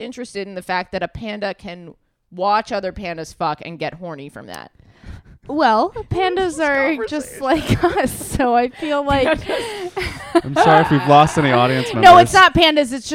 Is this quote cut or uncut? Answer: uncut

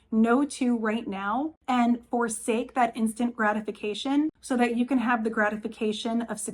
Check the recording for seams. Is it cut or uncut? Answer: cut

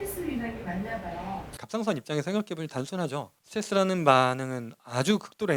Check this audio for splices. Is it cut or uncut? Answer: cut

